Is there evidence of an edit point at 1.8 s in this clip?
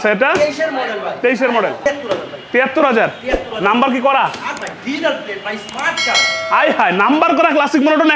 yes; 1 cut; at 1.8 s

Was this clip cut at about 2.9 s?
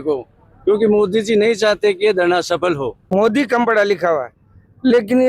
yes; 1 cut; at 2.9 s

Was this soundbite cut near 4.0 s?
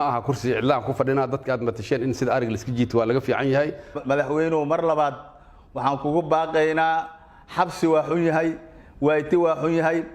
yes; 1 cut; at 4.0 s

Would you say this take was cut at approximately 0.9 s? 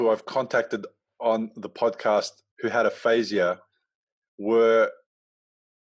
no; 1 cut; at 2.4 s

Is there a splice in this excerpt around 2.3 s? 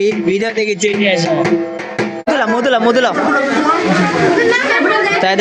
yes; 1 cut; at 2.3 s

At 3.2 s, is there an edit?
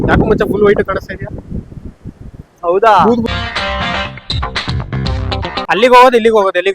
yes; 2 cuts; at 3.2 s, 5.6 s

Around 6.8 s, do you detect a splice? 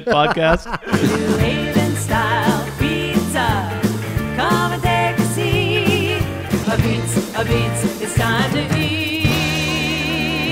no; 1 cut; at 0.9 s

